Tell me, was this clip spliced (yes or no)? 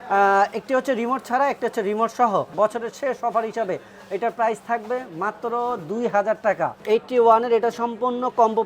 yes